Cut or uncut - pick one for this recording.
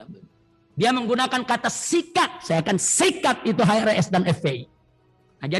uncut